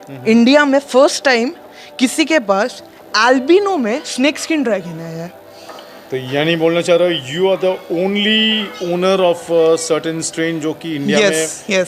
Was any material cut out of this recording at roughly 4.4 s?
no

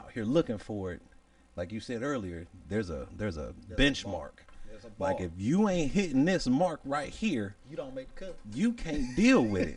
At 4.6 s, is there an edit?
no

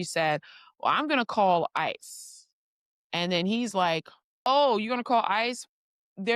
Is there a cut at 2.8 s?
no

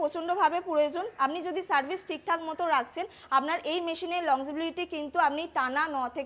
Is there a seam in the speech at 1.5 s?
no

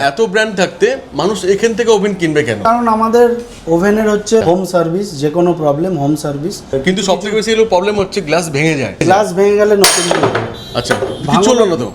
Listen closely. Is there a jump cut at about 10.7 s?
no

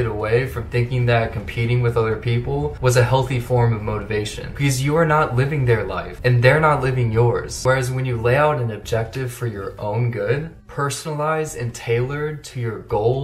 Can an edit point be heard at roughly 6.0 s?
yes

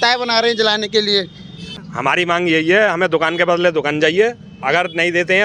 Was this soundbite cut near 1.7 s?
yes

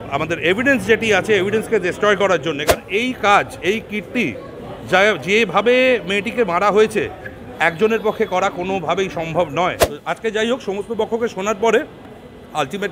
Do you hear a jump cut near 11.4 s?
no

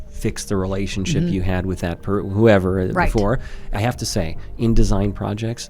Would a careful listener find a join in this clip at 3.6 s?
yes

